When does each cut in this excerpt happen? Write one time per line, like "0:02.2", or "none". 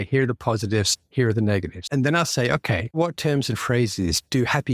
0:01.8
0:02.9